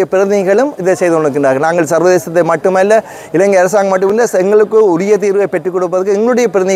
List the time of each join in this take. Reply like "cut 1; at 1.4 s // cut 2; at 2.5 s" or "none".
cut 1; at 4.1 s

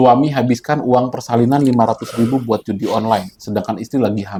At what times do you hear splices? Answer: none

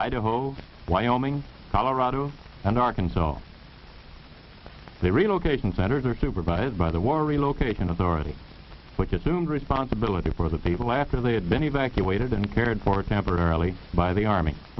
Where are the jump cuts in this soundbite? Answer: cut 1; at 5.9 s

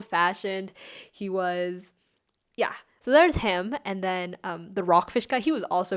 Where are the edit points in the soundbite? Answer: cut 1; at 2.9 s

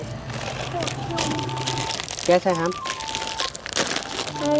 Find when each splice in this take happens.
cut 1; at 1.8 s

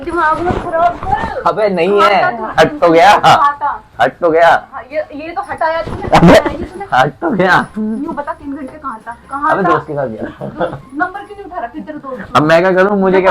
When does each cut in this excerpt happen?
none

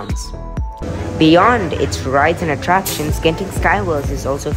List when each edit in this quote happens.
cut 1; at 1.0 s

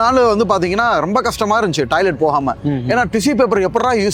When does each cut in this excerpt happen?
none

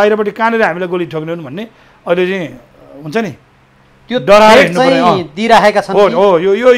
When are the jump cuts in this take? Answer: none

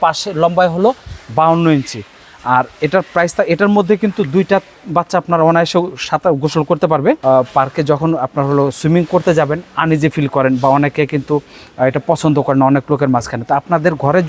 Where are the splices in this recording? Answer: cut 1; at 7.2 s

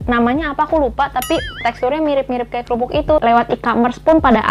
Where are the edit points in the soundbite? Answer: cut 1; at 3.2 s

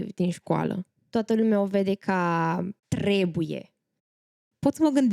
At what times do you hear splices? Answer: cut 1; at 0.9 s // cut 2; at 2.8 s // cut 3; at 4.2 s

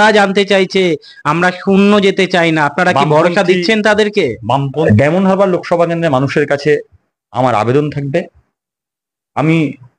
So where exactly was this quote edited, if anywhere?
cut 1; at 4.9 s

